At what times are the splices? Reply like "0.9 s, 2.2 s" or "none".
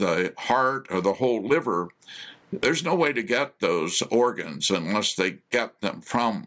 none